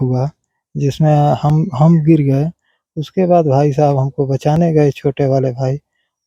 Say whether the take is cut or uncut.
uncut